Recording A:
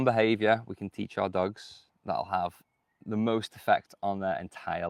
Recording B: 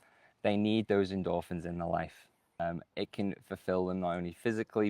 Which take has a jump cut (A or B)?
B